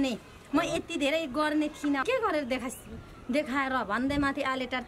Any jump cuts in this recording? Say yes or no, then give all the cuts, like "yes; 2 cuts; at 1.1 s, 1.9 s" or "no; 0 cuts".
yes; 1 cut; at 2.0 s